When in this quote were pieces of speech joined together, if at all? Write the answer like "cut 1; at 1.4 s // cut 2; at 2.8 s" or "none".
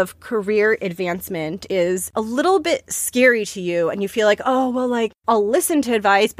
cut 1; at 1.7 s // cut 2; at 5.2 s